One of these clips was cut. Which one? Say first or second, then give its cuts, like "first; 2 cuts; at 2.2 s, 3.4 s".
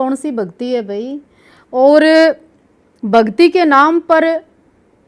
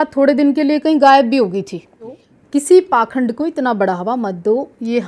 second; 1 cut; at 2.3 s